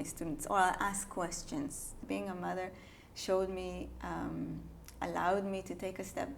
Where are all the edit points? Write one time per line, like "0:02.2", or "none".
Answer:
0:02.0